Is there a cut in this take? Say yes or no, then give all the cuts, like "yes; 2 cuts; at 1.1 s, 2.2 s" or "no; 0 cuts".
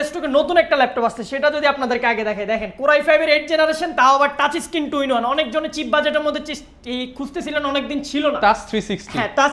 no; 0 cuts